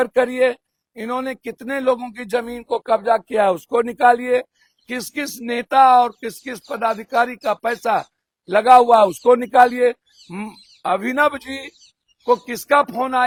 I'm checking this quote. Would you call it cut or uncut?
uncut